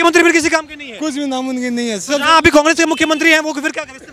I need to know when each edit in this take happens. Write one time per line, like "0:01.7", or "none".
none